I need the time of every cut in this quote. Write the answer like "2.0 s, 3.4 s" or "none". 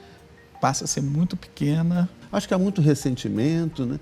2.2 s